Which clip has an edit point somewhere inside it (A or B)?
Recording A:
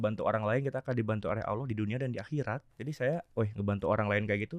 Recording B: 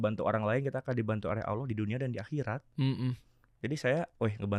A